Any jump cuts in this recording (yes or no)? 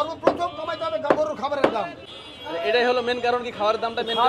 yes